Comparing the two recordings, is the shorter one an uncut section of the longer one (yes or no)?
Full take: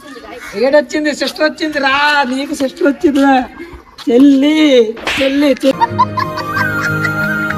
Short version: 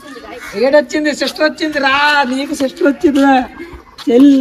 yes